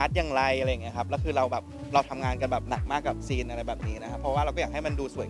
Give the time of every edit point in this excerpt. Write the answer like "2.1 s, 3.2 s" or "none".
none